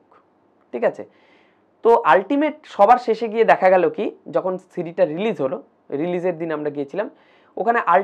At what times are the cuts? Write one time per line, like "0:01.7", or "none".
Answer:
none

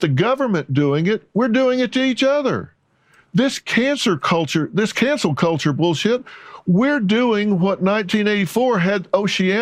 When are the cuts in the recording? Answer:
none

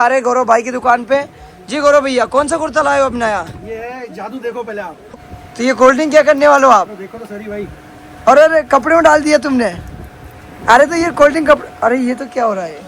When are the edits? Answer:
0:05.0

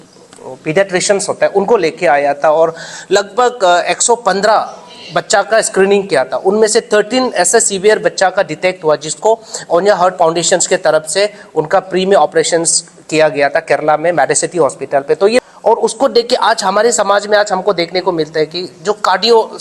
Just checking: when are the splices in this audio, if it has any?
0:15.4

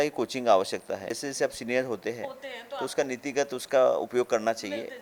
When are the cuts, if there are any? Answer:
0:01.2

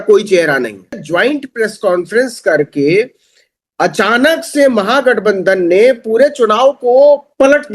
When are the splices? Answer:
0:01.0

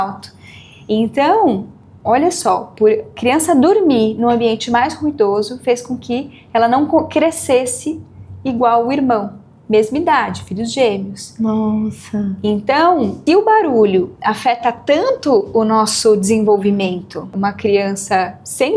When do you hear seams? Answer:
0:03.1
0:13.2
0:17.3

